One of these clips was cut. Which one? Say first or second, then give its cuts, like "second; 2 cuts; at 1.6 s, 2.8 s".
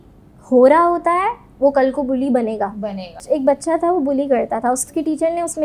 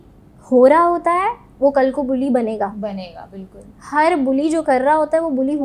first; 2 cuts; at 3.2 s, 4.9 s